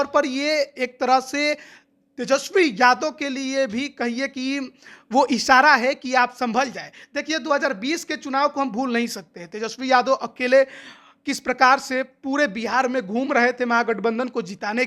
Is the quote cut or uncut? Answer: uncut